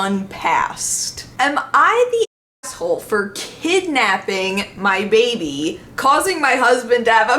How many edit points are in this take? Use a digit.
1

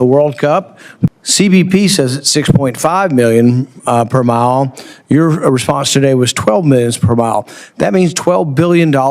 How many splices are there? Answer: 1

